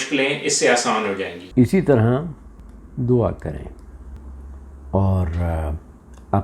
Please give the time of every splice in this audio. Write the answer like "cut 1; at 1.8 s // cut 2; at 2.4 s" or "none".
none